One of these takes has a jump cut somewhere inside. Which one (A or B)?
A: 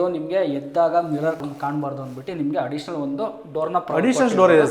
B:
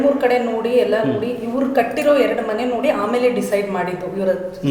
A